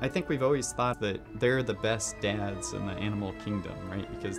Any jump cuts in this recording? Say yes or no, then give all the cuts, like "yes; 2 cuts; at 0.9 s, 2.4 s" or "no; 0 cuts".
yes; 1 cut; at 1.0 s